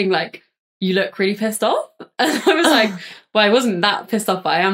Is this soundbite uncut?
yes; 0 cuts

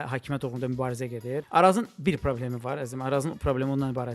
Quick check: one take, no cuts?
no; 1 cut; at 1.5 s

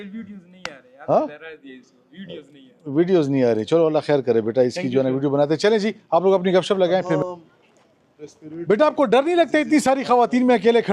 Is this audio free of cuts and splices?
no; 2 cuts; at 7.2 s, 9.5 s

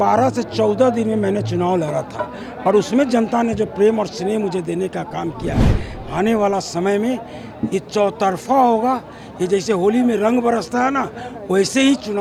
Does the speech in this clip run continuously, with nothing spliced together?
yes; 0 cuts

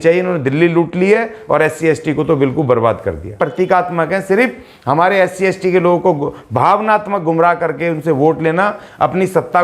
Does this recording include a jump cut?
yes; 1 cut; at 3.4 s

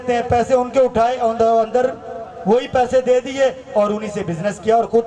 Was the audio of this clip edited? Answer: no; 0 cuts

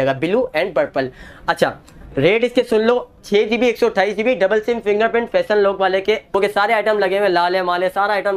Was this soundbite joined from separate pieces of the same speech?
yes; 1 cut; at 6.3 s

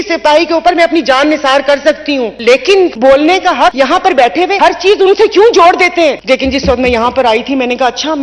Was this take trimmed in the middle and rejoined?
yes; 5 cuts; at 2.3 s, 2.9 s, 3.7 s, 4.5 s, 6.2 s

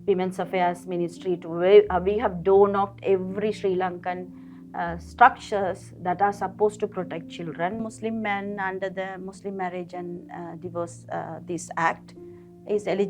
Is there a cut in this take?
yes; 1 cut; at 7.8 s

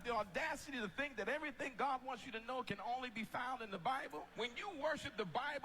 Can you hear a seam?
yes; 1 cut; at 2.6 s

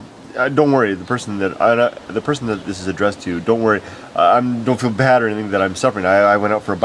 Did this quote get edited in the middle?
no; 0 cuts

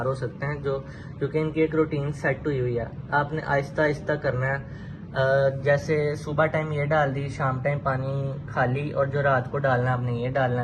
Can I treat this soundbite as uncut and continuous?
yes; 0 cuts

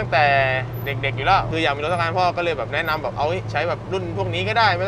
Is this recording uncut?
no; 1 cut; at 1.5 s

